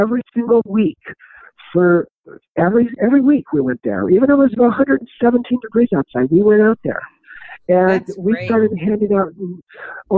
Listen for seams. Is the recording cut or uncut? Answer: uncut